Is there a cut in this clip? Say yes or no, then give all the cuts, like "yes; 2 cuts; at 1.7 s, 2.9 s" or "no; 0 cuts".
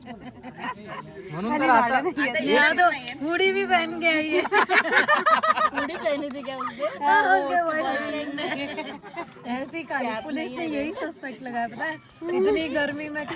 no; 0 cuts